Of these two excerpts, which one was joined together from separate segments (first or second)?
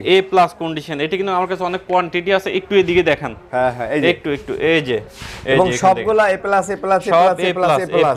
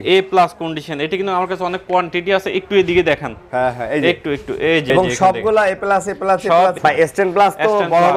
second